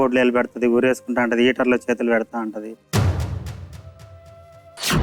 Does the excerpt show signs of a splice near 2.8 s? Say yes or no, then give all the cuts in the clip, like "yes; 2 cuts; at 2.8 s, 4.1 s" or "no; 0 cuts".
yes; 1 cut; at 2.8 s